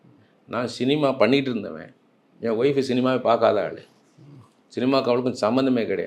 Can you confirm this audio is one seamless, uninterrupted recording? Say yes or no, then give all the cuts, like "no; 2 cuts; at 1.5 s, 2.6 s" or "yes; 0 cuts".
yes; 0 cuts